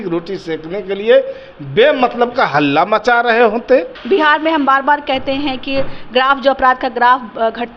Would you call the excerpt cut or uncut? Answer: cut